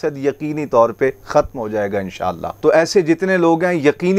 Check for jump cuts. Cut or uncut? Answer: cut